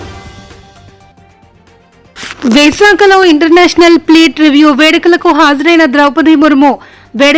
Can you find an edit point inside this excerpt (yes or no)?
yes